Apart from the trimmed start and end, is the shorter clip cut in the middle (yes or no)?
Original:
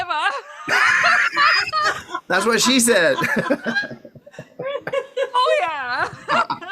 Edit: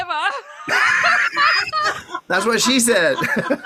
no